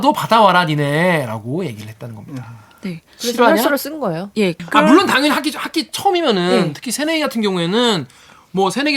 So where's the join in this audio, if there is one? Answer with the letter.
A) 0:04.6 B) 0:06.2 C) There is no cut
A